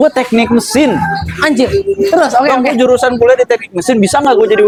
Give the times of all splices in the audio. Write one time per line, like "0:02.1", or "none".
none